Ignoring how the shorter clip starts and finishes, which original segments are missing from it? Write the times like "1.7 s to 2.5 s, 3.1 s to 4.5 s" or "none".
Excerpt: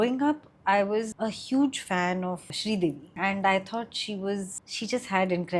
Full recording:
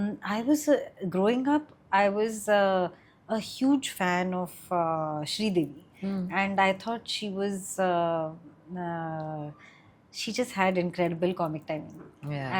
2.4 s to 3.2 s, 4.7 s to 5.7 s, 7.6 s to 10.0 s